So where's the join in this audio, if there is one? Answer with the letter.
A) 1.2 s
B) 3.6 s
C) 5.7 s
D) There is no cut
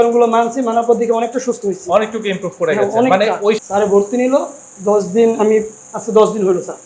B